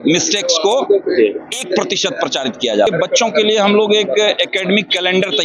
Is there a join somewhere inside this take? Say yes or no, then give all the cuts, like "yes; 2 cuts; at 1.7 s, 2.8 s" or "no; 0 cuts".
yes; 1 cut; at 2.9 s